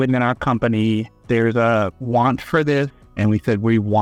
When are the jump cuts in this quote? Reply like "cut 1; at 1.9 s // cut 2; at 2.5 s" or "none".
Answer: none